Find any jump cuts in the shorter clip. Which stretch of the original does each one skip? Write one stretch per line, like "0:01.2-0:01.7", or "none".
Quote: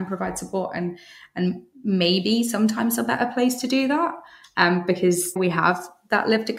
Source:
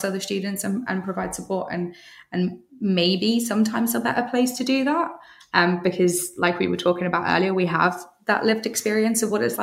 0:06.3-0:07.5